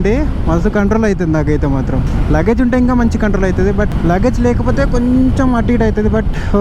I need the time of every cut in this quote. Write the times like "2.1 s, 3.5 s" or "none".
none